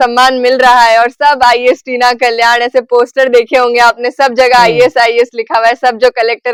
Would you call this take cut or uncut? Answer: uncut